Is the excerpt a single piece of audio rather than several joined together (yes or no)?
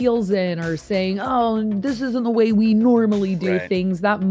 yes